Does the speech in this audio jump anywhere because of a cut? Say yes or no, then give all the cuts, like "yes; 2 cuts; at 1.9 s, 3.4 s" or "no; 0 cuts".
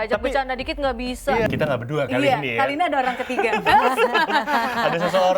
yes; 1 cut; at 1.5 s